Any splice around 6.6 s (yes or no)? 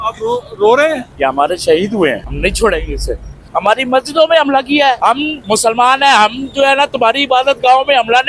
no